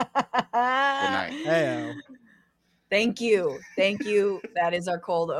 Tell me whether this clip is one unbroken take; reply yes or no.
yes